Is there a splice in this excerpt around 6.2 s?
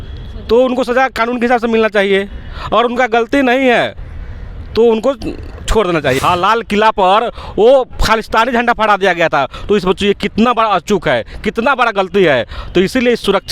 yes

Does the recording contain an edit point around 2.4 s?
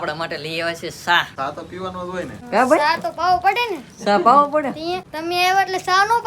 yes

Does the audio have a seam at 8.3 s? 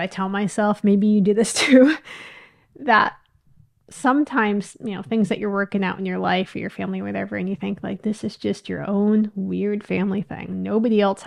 no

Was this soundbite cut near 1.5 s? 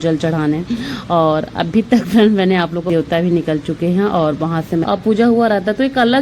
no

